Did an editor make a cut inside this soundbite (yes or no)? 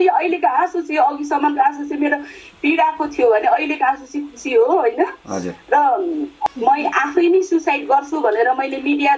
yes